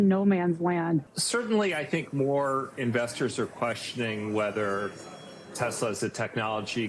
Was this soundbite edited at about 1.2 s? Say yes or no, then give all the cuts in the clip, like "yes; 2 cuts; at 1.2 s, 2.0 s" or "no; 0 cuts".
yes; 1 cut; at 1.2 s